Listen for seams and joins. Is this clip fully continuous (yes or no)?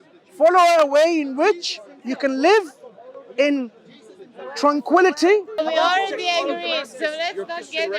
no